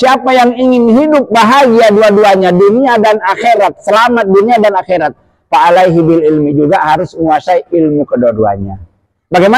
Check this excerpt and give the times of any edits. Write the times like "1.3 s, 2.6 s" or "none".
none